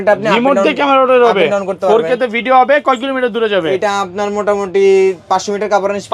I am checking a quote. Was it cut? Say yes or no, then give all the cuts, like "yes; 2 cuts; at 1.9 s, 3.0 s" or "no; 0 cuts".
no; 0 cuts